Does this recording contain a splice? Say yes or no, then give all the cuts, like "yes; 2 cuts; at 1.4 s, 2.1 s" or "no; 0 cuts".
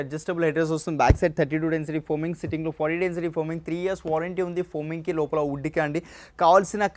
no; 0 cuts